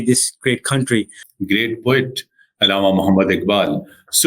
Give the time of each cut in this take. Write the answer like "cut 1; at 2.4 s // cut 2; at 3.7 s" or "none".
cut 1; at 1.2 s

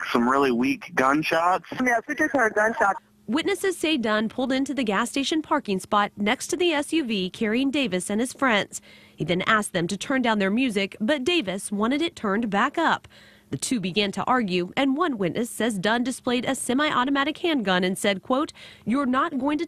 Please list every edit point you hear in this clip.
none

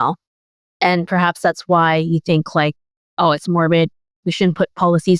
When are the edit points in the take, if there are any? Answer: none

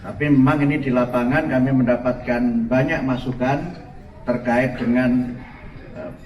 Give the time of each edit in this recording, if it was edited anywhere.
none

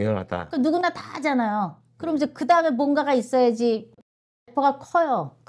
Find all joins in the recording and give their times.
cut 1; at 4.3 s

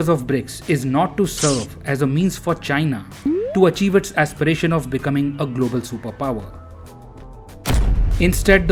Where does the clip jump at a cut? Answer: none

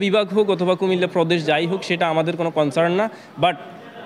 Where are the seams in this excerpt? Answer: none

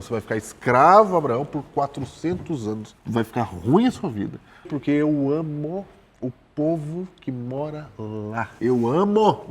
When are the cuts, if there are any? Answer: cut 1; at 2.9 s // cut 2; at 4.7 s // cut 3; at 8.5 s

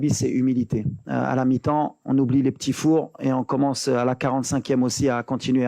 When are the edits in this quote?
cut 1; at 1.0 s

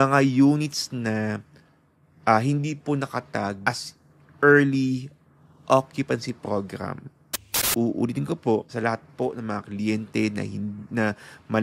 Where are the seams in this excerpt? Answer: cut 1; at 3.6 s // cut 2; at 7.6 s

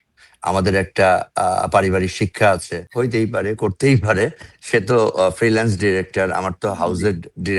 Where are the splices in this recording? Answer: cut 1; at 2.8 s

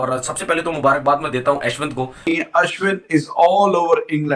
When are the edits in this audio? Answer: cut 1; at 2.2 s

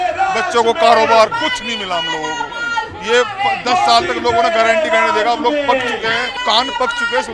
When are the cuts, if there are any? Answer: cut 1; at 6.3 s

